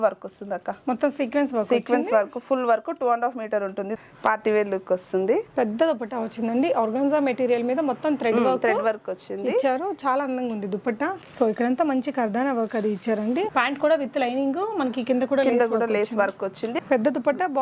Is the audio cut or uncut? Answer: cut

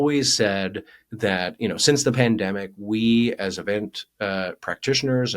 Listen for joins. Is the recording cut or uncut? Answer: cut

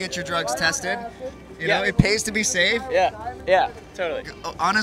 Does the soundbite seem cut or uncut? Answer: uncut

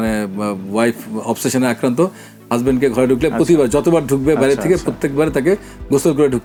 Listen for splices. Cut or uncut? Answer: uncut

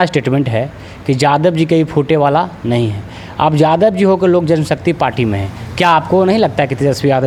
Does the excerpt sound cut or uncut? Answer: uncut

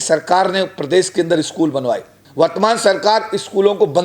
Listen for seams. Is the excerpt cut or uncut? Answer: cut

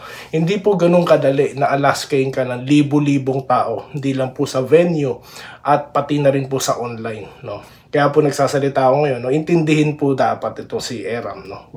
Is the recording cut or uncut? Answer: uncut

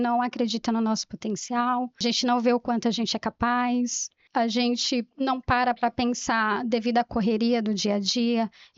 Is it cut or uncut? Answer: cut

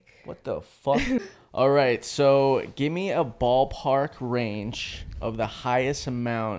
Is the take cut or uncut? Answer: cut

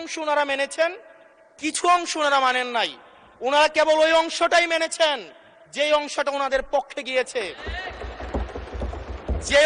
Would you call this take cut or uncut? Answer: uncut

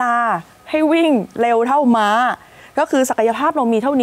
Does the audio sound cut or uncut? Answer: uncut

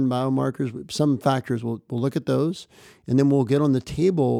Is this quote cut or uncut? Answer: uncut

